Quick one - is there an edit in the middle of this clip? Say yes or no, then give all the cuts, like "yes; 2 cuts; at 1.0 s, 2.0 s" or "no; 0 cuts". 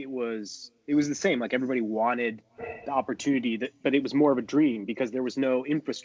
no; 0 cuts